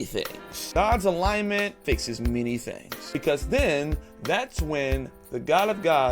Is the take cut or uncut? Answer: cut